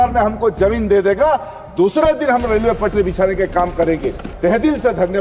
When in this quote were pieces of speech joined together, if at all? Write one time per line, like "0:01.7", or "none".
0:04.3